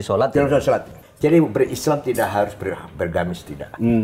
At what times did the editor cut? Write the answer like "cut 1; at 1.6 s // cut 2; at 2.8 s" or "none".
cut 1; at 1.0 s